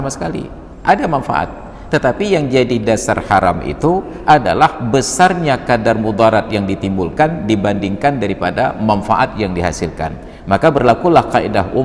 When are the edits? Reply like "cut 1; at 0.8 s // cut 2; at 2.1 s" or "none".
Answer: none